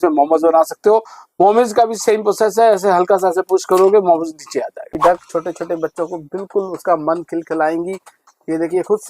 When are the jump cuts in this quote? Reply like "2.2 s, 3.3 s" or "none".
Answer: 4.8 s